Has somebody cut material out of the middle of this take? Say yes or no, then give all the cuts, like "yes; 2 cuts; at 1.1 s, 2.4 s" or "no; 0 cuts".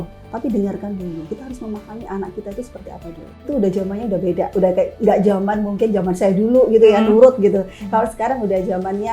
yes; 1 cut; at 3.5 s